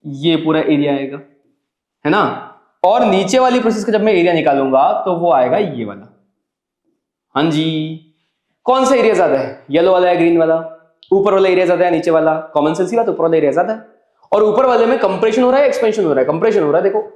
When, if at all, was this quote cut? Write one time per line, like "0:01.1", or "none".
none

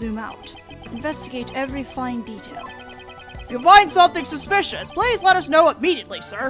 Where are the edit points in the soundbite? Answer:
none

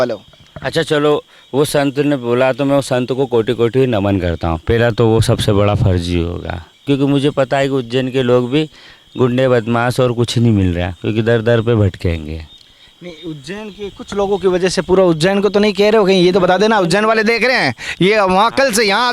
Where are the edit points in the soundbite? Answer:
0:06.8

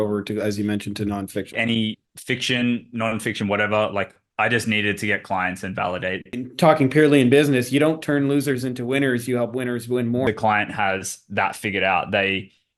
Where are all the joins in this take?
0:01.5
0:06.3
0:10.2

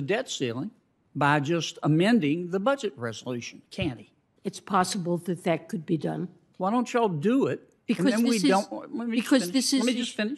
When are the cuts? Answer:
0:06.4

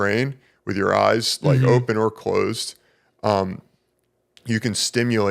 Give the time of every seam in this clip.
none

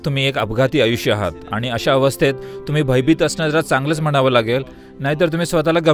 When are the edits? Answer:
none

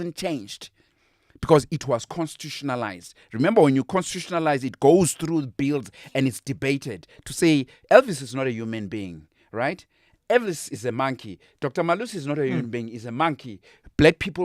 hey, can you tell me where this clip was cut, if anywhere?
none

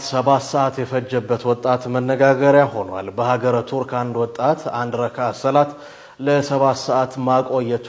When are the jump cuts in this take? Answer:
none

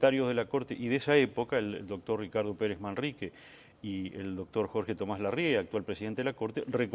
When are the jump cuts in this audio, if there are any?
none

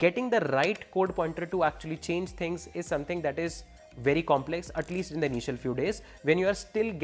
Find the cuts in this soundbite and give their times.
none

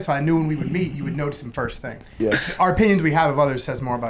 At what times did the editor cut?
0:02.1

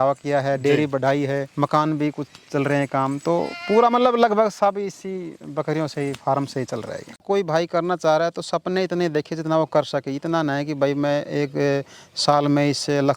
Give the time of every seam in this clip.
0:07.2

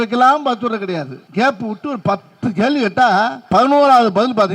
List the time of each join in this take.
0:01.2
0:03.4

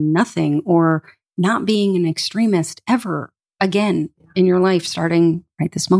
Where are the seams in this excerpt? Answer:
none

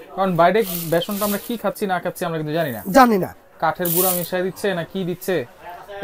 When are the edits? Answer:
none

